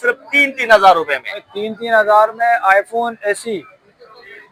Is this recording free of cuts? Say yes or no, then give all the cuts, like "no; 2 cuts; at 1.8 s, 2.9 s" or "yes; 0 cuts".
yes; 0 cuts